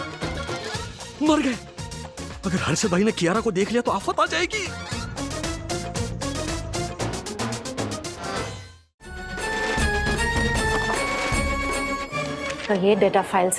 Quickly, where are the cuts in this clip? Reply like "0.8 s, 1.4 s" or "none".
9.3 s